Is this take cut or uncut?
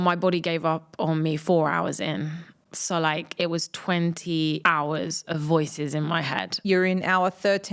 cut